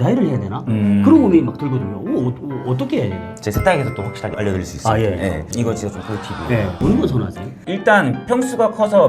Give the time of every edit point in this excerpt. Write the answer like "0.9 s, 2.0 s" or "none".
4.3 s, 6.8 s